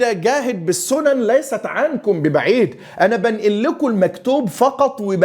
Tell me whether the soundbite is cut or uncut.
uncut